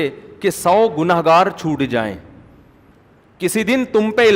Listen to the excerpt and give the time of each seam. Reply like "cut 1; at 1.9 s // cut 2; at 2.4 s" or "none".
cut 1; at 2.9 s